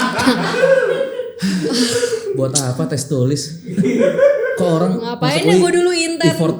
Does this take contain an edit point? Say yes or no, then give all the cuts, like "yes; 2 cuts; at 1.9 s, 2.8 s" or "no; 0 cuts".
no; 0 cuts